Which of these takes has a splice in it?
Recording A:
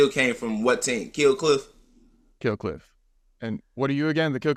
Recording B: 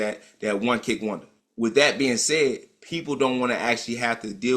B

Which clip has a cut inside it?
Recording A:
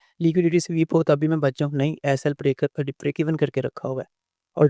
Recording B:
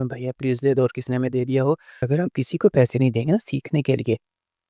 B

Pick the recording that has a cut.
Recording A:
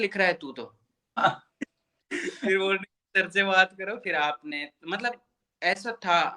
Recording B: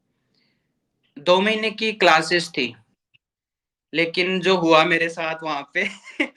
A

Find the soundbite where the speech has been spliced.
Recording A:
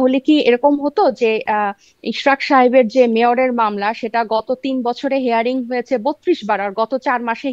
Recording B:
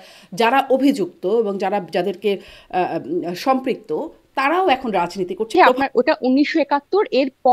B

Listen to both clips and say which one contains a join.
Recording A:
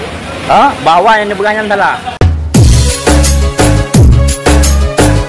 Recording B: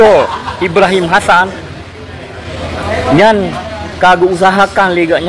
A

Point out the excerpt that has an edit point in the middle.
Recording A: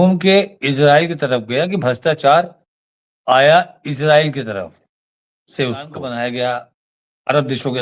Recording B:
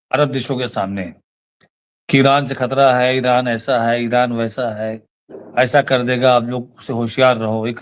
A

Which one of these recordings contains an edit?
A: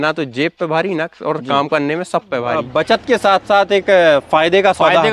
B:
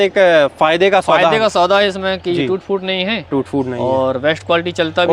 A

